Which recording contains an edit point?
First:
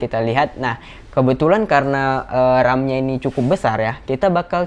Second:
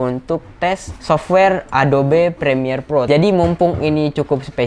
second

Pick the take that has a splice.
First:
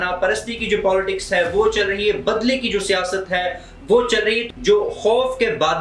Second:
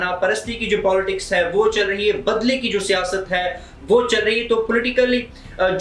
first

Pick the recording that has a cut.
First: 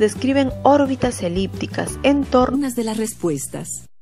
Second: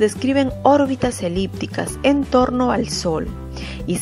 second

